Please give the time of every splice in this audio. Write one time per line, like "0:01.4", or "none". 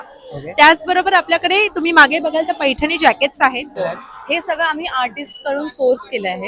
0:03.8

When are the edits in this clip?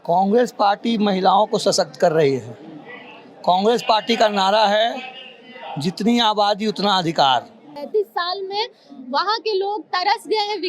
0:07.8

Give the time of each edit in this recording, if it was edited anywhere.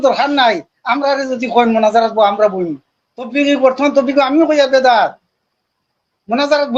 0:03.3

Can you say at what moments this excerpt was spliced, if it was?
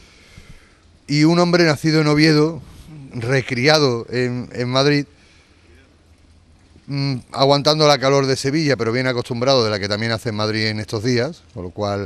0:07.2

